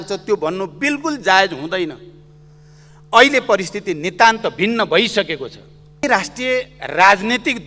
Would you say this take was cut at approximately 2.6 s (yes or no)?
no